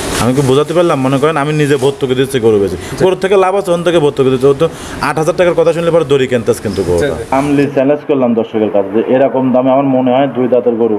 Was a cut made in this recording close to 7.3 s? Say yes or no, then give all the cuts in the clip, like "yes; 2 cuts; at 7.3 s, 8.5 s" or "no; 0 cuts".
yes; 1 cut; at 7.3 s